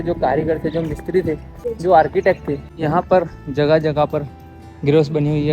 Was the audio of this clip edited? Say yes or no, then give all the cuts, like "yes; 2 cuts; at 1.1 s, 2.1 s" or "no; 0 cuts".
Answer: yes; 2 cuts; at 1.6 s, 2.7 s